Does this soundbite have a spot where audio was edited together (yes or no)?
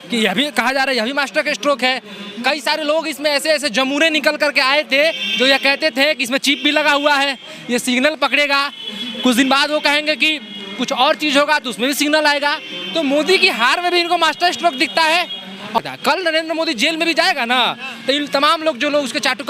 yes